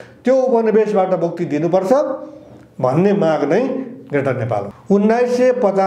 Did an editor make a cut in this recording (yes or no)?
yes